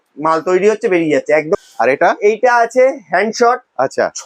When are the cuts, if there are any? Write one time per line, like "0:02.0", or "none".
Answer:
0:01.6